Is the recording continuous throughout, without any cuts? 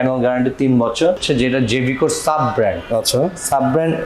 no; 1 cut; at 1.2 s

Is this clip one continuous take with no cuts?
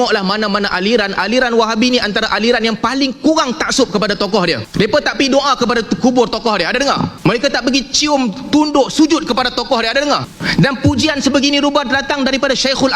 no; 3 cuts; at 4.6 s, 7.1 s, 10.4 s

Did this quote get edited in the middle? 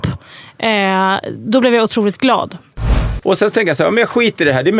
yes; 1 cut; at 3.0 s

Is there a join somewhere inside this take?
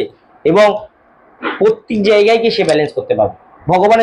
no; 0 cuts

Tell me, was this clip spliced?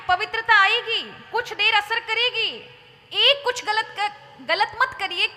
no; 0 cuts

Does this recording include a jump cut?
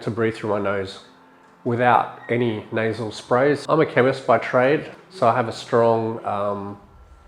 yes; 2 cuts; at 3.6 s, 5.0 s

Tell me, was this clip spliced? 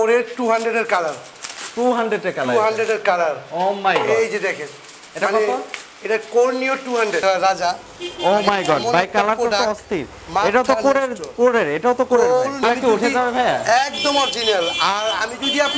yes; 2 cuts; at 7.2 s, 12.6 s

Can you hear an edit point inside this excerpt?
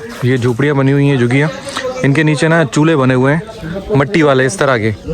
no; 0 cuts

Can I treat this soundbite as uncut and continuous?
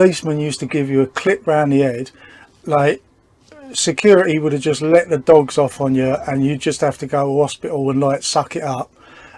yes; 0 cuts

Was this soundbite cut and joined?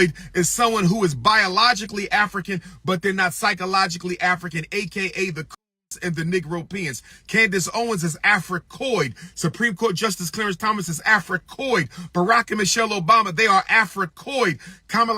no; 0 cuts

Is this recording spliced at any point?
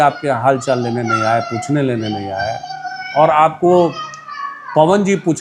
no; 0 cuts

